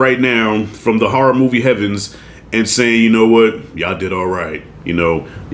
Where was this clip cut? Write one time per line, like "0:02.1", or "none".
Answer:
none